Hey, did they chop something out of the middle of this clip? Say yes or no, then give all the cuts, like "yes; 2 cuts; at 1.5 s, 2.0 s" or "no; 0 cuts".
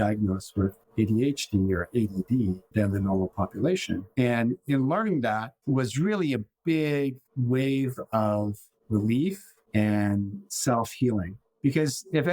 no; 0 cuts